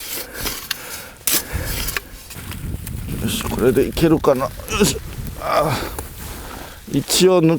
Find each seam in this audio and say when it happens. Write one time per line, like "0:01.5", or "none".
0:02.4